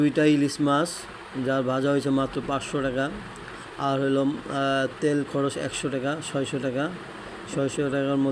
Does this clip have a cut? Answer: no; 0 cuts

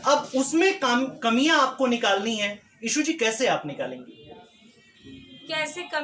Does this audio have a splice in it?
no; 0 cuts

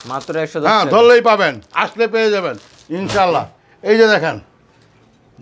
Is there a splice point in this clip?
no; 0 cuts

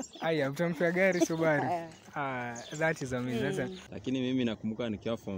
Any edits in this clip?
yes; 1 cut; at 3.8 s

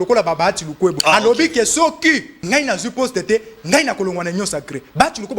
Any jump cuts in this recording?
yes; 2 cuts; at 1.0 s, 2.3 s

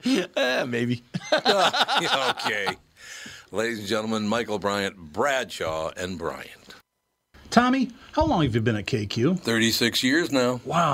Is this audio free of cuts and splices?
no; 1 cut; at 7.0 s

